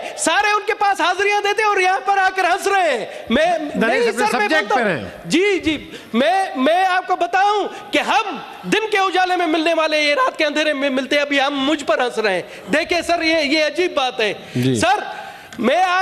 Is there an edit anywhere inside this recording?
no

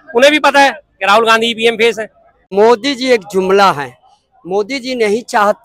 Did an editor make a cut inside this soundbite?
yes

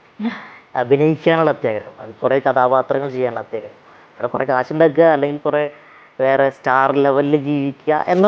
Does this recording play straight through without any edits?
yes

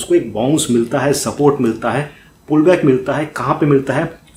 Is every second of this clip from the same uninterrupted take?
yes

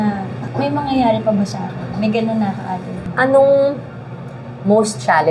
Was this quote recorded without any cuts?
no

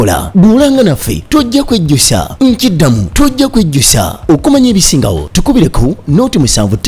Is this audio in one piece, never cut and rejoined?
yes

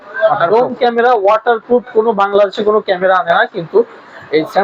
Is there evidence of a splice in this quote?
no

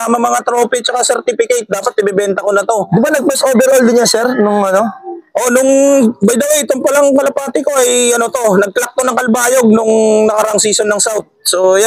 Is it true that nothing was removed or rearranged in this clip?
yes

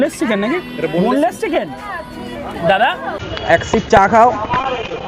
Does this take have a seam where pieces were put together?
yes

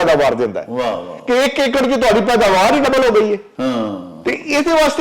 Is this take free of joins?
yes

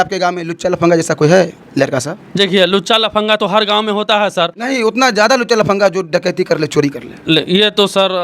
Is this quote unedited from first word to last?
yes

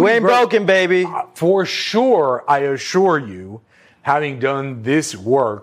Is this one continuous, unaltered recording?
yes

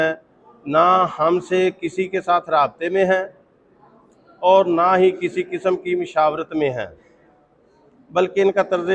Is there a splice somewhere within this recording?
no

